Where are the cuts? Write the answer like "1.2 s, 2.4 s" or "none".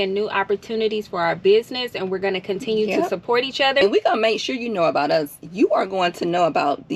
3.8 s